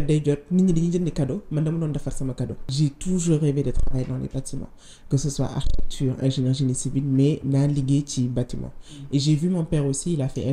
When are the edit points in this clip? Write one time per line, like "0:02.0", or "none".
0:02.7